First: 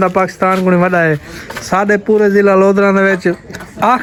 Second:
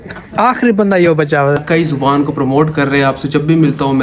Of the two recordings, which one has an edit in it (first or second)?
second